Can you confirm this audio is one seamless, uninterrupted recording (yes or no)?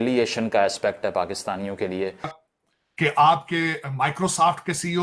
no